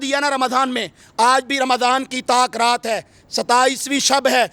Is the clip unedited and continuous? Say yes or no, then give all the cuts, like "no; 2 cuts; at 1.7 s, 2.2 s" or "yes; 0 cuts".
yes; 0 cuts